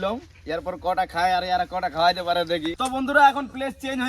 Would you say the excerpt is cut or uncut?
cut